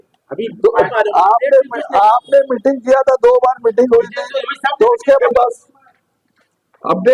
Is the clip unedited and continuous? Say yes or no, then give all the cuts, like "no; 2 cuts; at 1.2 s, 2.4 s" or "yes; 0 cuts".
no; 2 cuts; at 0.9 s, 5.2 s